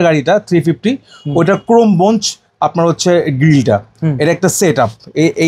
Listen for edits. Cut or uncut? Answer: uncut